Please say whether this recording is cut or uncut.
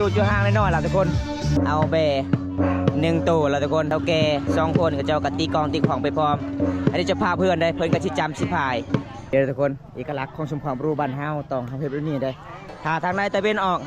cut